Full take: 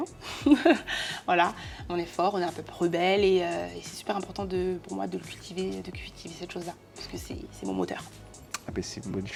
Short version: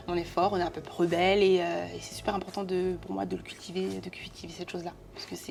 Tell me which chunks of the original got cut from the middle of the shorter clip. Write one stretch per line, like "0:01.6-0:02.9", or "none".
none